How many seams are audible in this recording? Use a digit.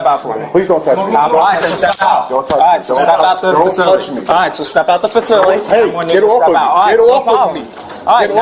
1